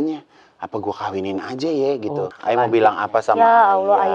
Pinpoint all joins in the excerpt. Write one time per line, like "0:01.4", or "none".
0:02.3

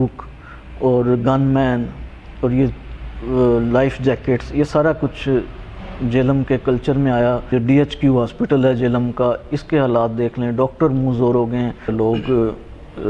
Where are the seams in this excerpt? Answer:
0:07.5
0:11.9

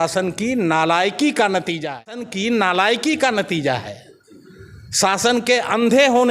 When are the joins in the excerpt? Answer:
0:02.3

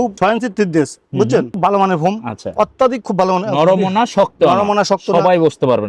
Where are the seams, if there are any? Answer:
none

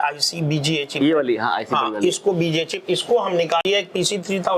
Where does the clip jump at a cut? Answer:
0:03.6

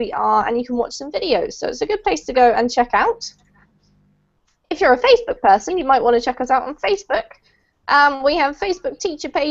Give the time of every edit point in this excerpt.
0:03.1

